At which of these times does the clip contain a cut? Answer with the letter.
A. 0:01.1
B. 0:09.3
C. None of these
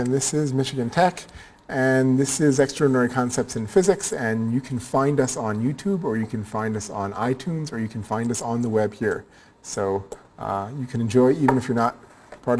A